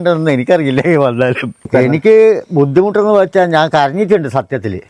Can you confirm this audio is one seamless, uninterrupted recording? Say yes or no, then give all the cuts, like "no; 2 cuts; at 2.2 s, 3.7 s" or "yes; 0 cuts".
no; 1 cut; at 1.6 s